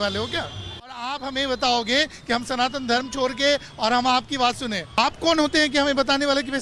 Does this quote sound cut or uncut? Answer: cut